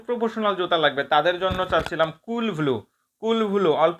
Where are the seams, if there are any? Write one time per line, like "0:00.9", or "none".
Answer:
none